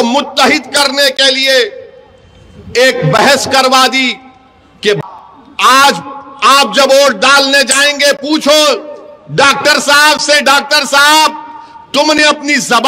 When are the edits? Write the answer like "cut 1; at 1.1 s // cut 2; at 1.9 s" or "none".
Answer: cut 1; at 5.0 s